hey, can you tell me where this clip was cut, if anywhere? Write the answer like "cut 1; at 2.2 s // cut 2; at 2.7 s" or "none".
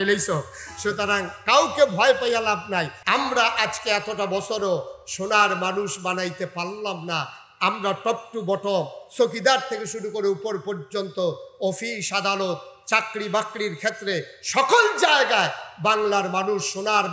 cut 1; at 3.0 s